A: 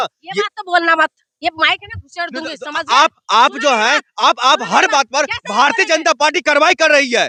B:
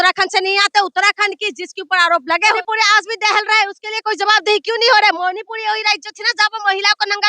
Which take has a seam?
B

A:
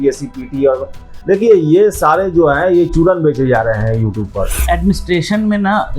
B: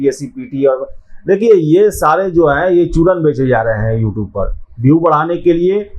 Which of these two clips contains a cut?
A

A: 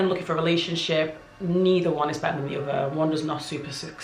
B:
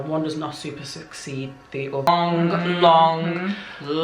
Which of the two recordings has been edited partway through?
B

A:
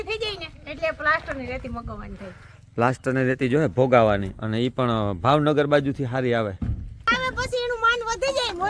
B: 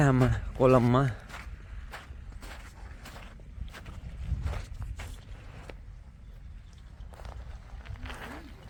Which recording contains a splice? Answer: A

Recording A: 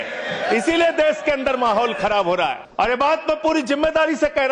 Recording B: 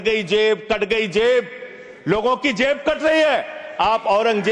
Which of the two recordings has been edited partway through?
A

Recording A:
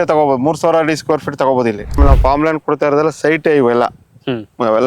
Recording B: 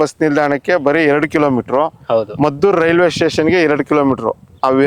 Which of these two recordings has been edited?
A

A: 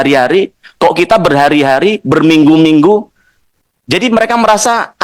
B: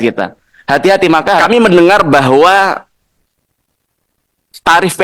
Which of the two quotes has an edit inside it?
B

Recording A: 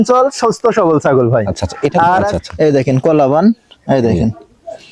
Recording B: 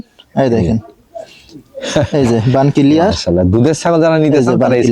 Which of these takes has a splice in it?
A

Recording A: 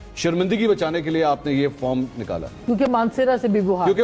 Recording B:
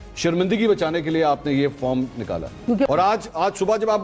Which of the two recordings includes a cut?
B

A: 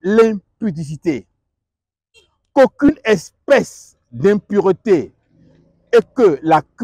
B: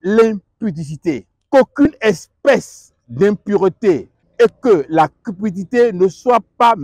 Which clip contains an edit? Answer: B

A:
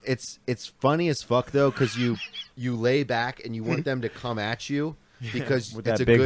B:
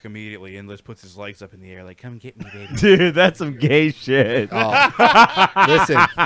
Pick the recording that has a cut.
B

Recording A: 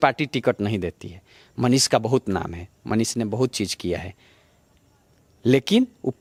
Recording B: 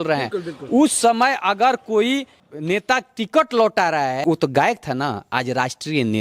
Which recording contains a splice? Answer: B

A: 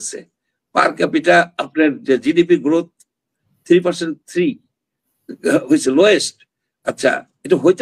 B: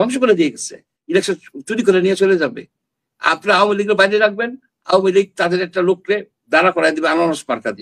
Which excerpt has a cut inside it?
B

